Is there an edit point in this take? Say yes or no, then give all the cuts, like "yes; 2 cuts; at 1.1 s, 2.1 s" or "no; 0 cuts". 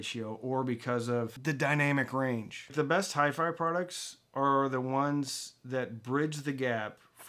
yes; 2 cuts; at 1.3 s, 2.7 s